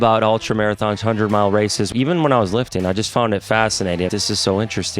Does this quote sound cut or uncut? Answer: cut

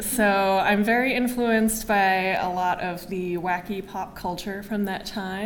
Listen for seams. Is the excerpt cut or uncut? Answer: cut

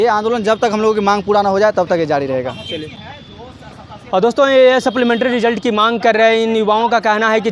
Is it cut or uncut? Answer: uncut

